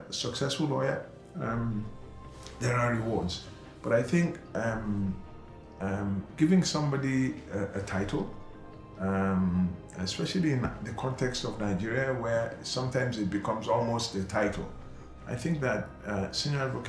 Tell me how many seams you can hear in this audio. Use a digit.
0